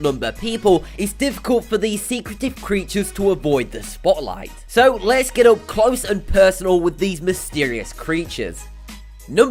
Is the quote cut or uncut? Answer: uncut